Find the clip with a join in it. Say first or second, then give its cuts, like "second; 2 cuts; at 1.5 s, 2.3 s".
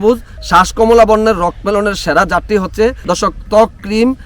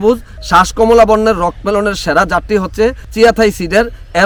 first; 1 cut; at 3.0 s